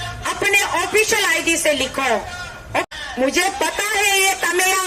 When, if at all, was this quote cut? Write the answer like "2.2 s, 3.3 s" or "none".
2.8 s